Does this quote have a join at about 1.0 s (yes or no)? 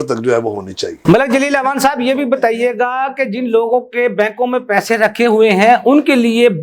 no